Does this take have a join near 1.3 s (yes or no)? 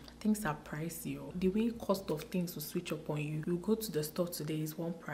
yes